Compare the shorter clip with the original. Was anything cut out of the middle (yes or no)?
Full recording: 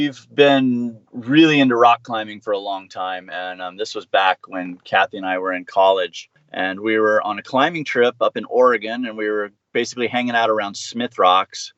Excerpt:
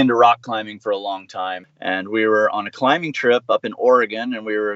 yes